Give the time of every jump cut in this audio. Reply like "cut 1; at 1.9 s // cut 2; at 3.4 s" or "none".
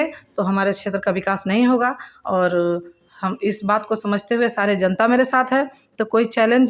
none